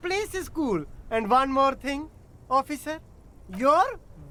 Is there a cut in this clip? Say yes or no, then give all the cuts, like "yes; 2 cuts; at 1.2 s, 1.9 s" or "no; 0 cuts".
no; 0 cuts